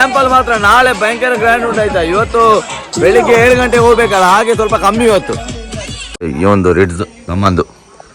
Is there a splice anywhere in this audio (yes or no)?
yes